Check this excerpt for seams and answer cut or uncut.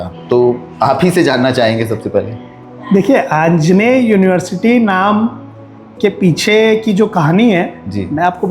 uncut